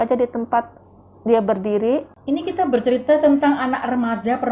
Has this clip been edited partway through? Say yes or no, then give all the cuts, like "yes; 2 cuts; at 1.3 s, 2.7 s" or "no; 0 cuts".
yes; 1 cut; at 2.1 s